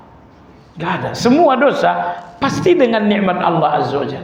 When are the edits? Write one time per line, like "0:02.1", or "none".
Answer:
none